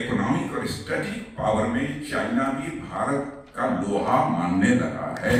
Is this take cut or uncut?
uncut